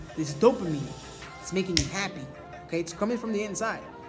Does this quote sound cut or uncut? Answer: uncut